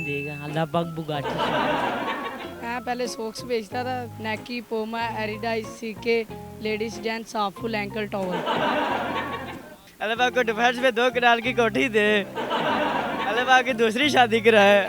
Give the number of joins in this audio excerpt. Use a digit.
2